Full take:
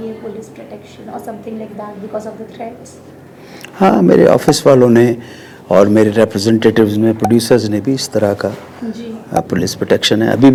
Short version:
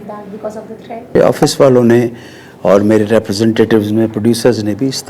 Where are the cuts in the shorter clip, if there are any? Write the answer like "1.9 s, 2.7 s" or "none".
1.2 s